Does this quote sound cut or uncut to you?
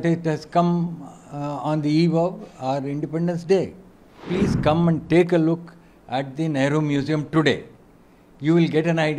cut